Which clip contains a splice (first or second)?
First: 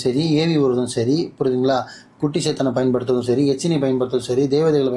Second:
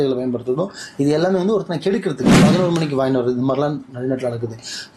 second